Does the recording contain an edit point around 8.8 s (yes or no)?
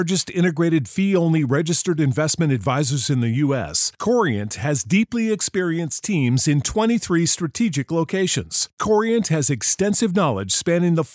no